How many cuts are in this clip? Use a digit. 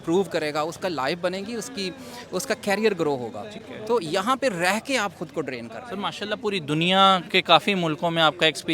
0